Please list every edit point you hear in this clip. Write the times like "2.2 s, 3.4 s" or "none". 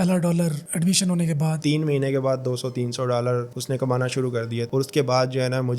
1.6 s, 4.7 s

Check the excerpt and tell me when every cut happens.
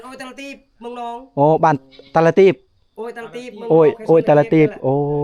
none

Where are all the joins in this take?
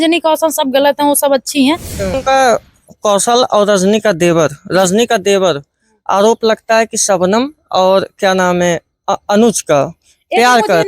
2.2 s

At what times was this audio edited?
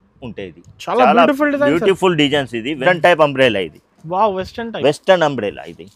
2.8 s

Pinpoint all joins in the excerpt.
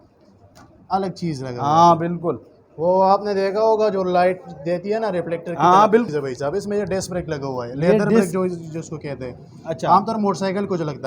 6.1 s

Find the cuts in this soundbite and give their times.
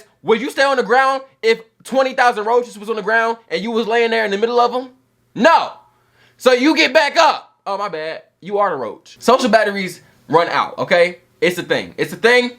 9.0 s

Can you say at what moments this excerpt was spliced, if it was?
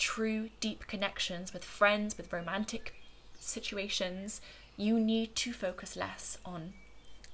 none

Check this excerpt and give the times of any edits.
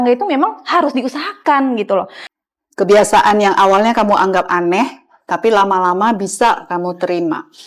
2.2 s

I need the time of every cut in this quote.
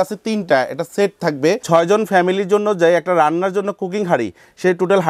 1.6 s

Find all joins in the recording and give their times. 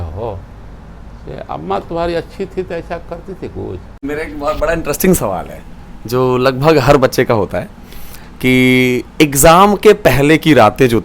4.0 s

